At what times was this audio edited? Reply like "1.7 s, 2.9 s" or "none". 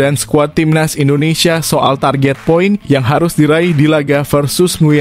none